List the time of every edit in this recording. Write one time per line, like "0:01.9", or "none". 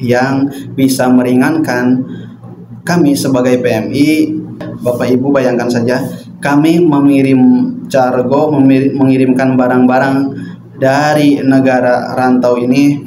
0:04.7